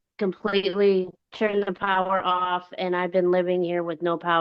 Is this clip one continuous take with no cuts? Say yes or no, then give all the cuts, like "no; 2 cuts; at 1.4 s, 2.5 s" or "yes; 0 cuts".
no; 1 cut; at 1.2 s